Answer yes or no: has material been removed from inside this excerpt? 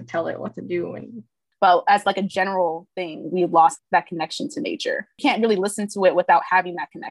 yes